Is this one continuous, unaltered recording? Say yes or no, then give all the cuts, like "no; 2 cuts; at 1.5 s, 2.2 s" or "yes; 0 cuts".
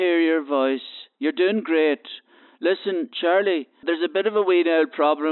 no; 1 cut; at 3.8 s